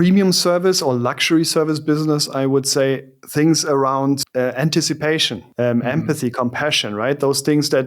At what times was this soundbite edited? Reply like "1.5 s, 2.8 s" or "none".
3.1 s, 4.2 s, 5.4 s